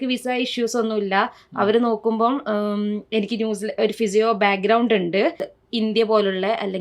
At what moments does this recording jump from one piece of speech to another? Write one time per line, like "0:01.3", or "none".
0:05.5